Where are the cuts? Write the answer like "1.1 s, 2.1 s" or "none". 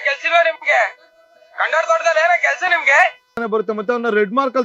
3.3 s